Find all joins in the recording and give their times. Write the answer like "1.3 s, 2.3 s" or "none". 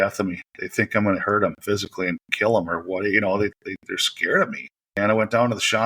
4.7 s